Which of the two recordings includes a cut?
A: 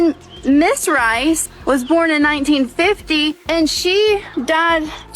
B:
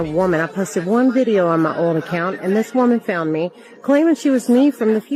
A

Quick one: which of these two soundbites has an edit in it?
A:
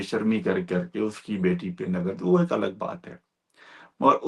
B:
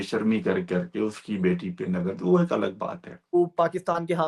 B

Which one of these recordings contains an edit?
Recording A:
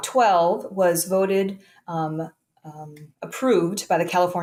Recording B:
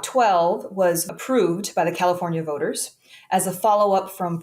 B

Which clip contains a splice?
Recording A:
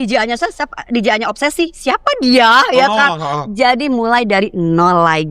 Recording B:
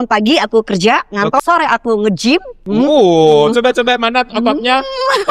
B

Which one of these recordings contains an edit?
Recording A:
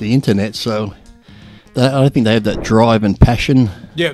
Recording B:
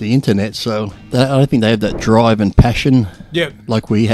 B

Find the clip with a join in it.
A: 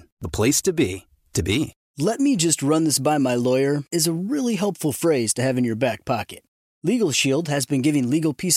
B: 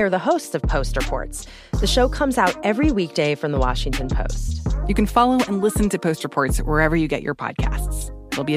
A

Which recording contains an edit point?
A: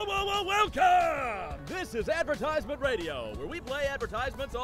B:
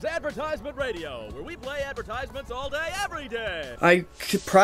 B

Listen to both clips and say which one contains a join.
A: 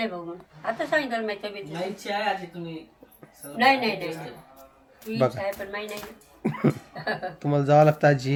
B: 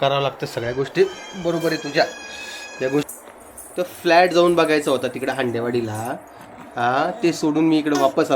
B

